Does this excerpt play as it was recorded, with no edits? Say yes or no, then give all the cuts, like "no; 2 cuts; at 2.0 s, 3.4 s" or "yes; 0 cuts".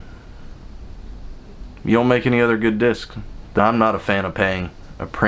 no; 1 cut; at 3.6 s